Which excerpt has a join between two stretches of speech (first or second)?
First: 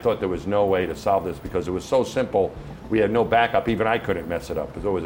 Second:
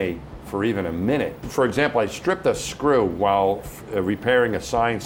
second